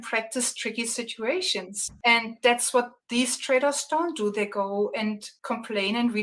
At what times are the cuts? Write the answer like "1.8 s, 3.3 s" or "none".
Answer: 1.8 s, 3.0 s, 5.3 s